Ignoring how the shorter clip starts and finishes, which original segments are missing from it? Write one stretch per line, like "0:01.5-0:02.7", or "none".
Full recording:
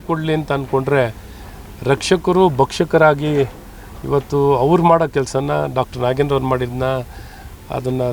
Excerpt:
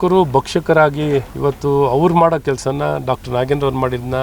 0:03.6-0:04.0